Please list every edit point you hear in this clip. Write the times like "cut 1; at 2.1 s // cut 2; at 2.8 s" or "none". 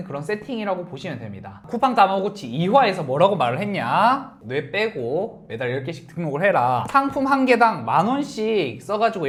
none